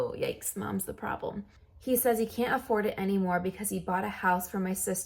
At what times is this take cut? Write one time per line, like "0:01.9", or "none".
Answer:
0:01.5